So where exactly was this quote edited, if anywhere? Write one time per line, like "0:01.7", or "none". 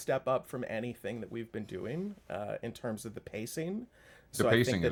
none

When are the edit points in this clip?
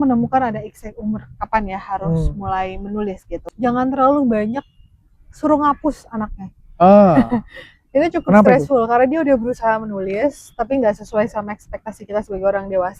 0:03.5

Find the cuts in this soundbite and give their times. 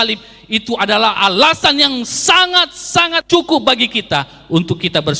0:03.2

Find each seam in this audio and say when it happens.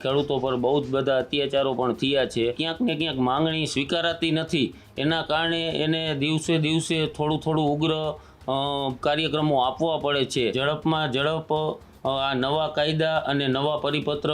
0:02.6
0:10.5

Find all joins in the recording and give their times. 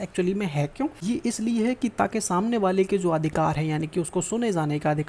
0:01.0

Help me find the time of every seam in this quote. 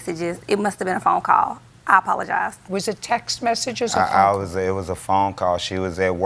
0:04.2

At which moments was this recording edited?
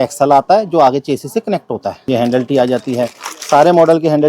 0:01.9
0:03.3

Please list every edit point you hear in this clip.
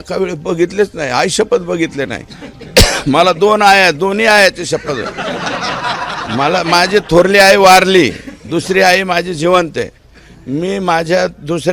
none

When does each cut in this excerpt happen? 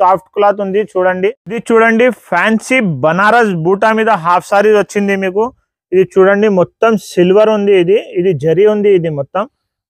0:01.2

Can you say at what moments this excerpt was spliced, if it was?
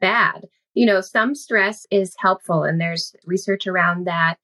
0:01.8
0:03.2

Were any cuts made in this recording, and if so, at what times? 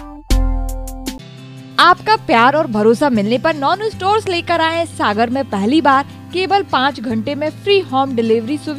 none

